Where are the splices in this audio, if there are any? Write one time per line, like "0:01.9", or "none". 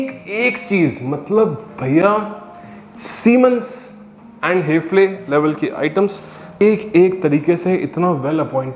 0:06.6